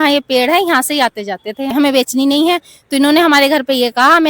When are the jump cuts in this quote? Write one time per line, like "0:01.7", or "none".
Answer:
0:01.7